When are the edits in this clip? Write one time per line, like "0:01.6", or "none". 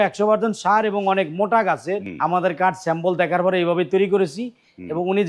0:02.1